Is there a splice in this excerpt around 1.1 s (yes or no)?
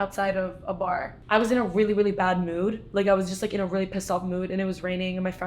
yes